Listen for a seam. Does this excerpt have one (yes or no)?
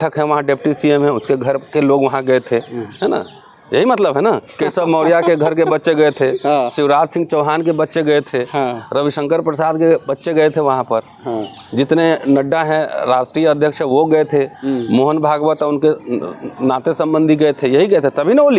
no